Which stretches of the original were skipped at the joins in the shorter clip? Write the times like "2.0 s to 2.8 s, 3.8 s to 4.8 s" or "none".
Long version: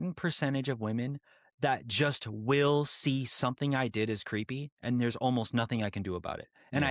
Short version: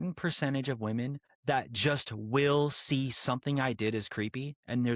1.3 s to 1.4 s